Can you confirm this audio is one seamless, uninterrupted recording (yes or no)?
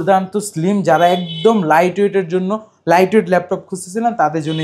yes